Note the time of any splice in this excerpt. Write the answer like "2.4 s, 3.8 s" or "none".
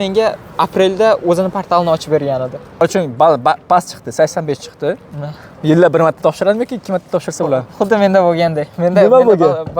2.8 s